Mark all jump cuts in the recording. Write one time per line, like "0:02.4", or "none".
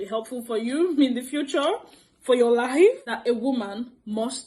0:03.0